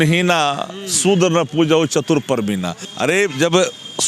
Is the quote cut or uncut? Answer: cut